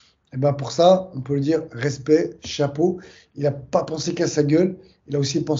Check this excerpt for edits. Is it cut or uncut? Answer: uncut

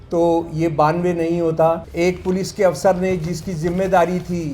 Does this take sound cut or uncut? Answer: cut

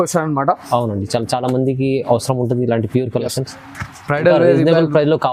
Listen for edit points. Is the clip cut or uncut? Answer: uncut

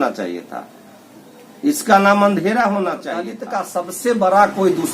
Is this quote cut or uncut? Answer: cut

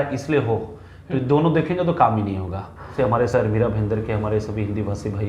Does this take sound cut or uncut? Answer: cut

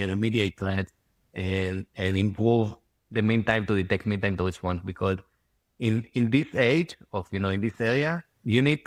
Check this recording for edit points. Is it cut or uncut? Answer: uncut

